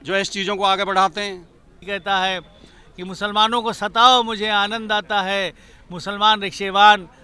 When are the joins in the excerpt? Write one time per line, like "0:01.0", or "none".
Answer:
0:01.8